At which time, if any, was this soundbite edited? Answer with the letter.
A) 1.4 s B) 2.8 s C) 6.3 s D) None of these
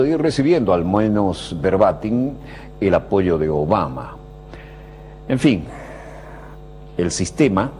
A